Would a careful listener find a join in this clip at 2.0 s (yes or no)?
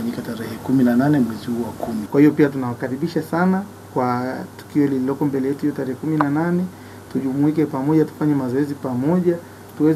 yes